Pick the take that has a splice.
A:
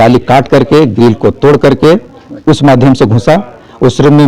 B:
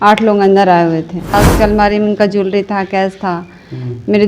B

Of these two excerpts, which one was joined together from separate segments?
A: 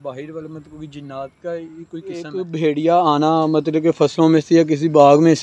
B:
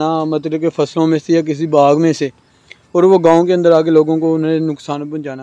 A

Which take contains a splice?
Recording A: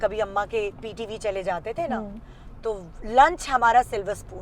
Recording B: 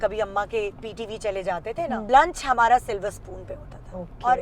B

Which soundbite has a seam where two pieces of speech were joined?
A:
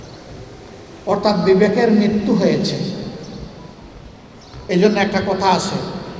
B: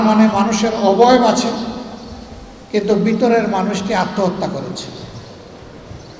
A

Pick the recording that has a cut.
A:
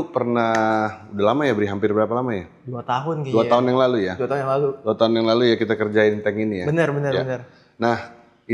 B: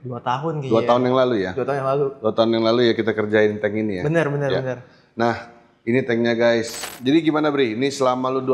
B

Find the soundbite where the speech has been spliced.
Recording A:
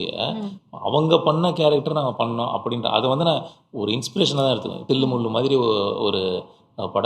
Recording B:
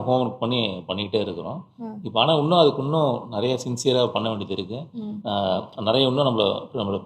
A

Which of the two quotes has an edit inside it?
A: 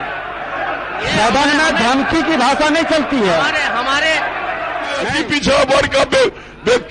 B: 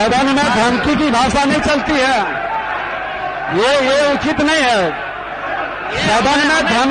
A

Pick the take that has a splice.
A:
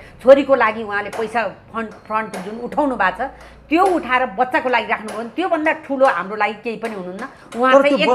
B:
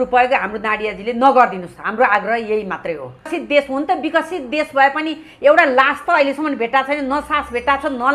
B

